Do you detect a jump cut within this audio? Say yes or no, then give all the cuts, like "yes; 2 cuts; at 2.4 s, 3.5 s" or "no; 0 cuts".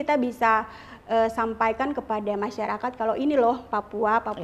no; 0 cuts